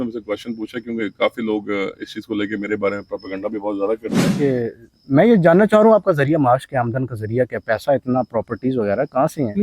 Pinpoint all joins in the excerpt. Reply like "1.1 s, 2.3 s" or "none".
4.4 s